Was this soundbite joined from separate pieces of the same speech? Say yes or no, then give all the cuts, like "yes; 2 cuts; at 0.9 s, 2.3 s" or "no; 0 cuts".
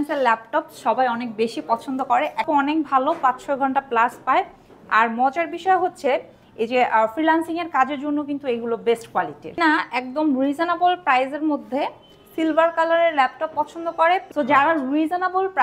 yes; 3 cuts; at 2.5 s, 9.5 s, 14.3 s